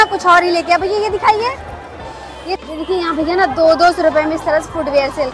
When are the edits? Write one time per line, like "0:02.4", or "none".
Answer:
0:02.6

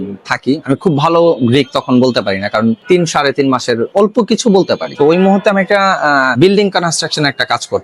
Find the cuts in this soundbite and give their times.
0:02.8
0:03.9
0:04.9
0:06.3

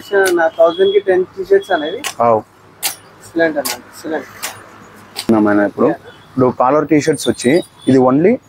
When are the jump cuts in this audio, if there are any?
none

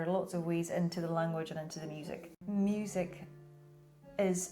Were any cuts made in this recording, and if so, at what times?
0:02.3

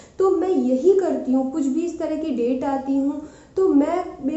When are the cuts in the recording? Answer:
none

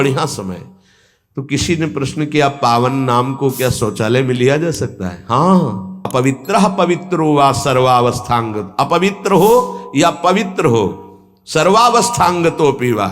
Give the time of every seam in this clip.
0:05.9

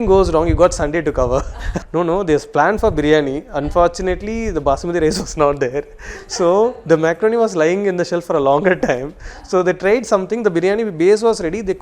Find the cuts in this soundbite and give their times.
0:01.7

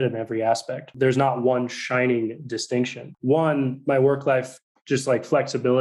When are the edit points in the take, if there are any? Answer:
0:00.9
0:03.0

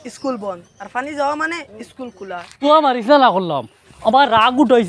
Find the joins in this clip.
0:02.5

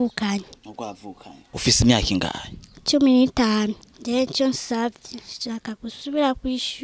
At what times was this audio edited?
0:01.5
0:03.9

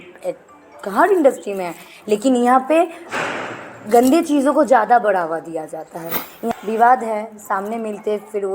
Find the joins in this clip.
0:06.5

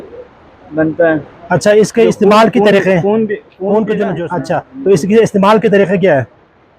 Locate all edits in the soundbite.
0:04.3

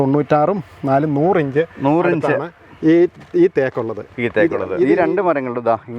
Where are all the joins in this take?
0:04.9

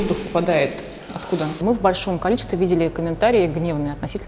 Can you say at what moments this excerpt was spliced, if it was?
0:01.6

